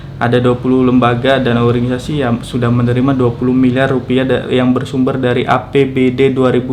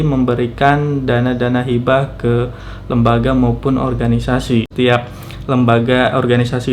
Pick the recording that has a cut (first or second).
second